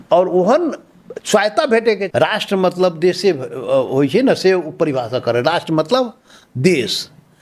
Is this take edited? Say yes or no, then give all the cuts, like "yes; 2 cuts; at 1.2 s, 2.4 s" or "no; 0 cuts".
yes; 1 cut; at 2.1 s